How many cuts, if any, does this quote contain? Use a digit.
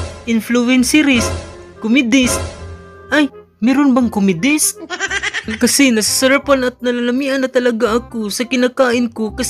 1